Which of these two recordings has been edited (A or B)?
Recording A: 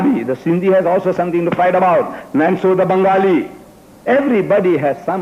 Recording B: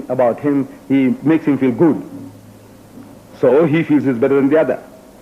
B